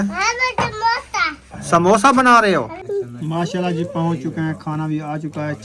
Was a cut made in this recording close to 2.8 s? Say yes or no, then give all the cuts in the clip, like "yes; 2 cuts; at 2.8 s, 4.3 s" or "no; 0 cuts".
yes; 1 cut; at 2.8 s